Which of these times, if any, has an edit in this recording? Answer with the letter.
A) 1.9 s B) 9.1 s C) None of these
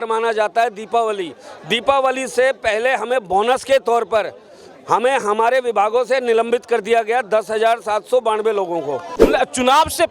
B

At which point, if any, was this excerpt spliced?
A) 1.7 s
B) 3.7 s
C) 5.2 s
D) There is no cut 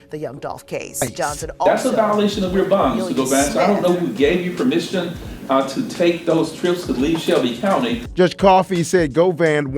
A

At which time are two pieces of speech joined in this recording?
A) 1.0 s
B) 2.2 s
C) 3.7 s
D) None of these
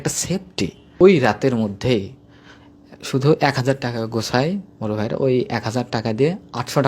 A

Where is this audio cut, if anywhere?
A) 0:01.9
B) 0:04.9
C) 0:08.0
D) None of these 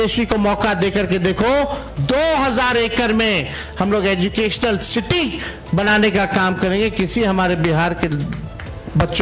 A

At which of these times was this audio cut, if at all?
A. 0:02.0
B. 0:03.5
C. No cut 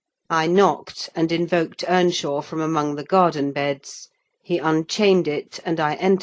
A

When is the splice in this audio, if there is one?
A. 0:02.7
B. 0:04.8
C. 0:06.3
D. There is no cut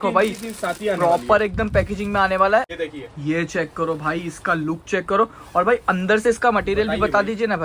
A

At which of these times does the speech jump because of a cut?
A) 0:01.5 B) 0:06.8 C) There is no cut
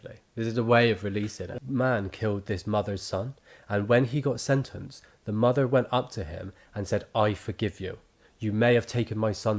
A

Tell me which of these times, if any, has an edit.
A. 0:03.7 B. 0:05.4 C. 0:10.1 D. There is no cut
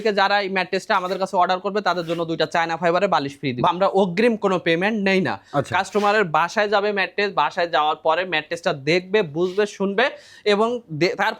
A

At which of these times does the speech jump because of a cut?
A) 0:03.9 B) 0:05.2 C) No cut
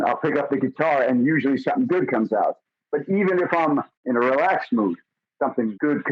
A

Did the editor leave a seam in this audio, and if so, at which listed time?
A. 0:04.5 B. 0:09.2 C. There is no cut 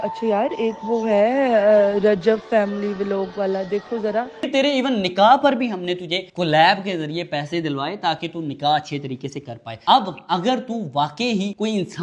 A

